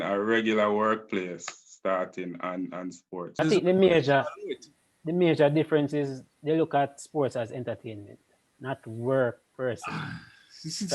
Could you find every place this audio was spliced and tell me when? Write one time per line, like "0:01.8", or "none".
0:03.4